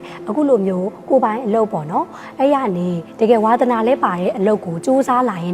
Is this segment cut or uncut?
uncut